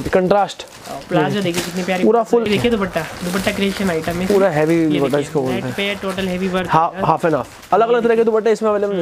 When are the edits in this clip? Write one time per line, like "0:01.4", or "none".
0:02.5